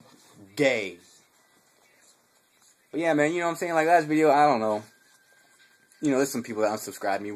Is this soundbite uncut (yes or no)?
yes